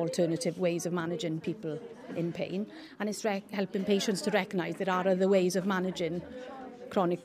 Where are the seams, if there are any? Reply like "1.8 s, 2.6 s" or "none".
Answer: none